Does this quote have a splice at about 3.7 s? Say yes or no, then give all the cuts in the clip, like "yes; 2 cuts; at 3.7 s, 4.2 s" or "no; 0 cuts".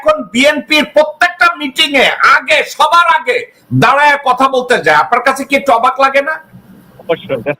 no; 0 cuts